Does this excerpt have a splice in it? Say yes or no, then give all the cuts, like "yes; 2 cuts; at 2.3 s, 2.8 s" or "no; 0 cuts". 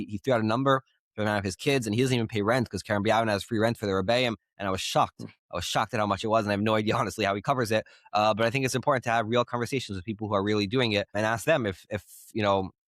no; 0 cuts